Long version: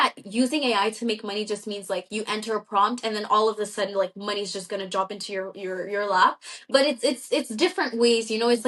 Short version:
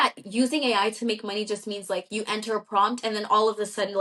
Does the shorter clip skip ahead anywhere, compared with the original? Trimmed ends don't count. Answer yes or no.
no